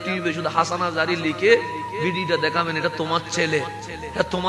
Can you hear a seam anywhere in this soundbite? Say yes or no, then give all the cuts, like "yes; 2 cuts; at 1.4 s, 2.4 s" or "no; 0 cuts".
no; 0 cuts